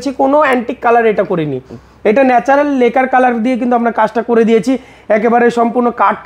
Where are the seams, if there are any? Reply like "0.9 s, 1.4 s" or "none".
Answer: none